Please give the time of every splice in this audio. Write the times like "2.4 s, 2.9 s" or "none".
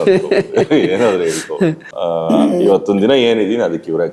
none